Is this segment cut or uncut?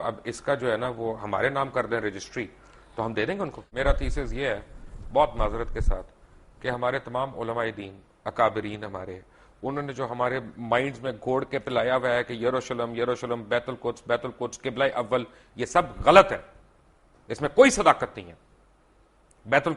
cut